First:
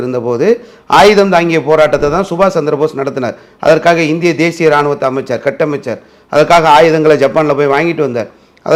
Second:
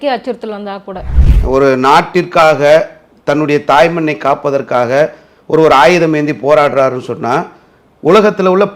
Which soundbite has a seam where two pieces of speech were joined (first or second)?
second